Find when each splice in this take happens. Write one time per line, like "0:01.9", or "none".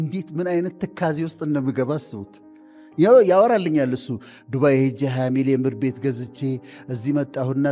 none